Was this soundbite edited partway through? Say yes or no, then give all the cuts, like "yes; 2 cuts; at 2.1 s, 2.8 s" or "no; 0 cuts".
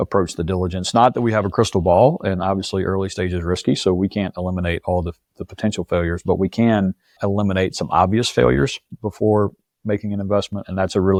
no; 0 cuts